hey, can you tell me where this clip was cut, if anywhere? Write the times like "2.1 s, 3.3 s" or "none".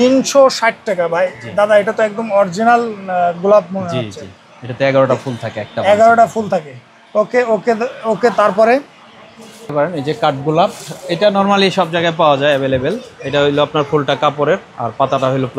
none